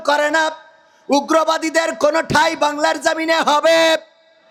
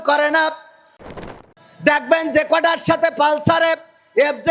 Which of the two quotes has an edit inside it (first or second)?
second